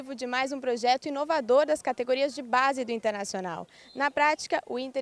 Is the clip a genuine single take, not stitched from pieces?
yes; 0 cuts

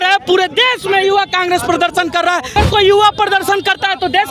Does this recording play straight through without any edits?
no; 1 cut; at 2.5 s

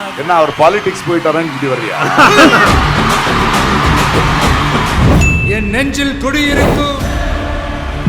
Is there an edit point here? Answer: yes; 1 cut; at 5.0 s

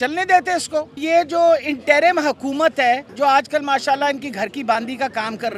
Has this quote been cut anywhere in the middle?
yes; 2 cuts; at 1.0 s, 3.1 s

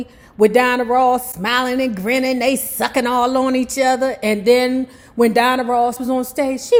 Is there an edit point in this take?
no; 0 cuts

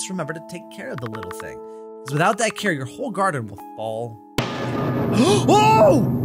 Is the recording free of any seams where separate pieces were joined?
yes; 0 cuts

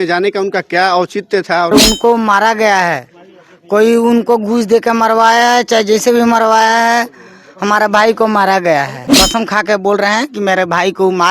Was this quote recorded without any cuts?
no; 2 cuts; at 1.7 s, 9.0 s

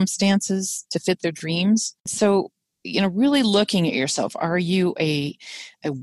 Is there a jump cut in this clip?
yes; 1 cut; at 2.1 s

